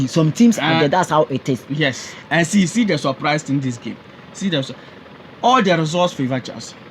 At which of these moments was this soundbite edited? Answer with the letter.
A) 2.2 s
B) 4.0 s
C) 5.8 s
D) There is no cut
A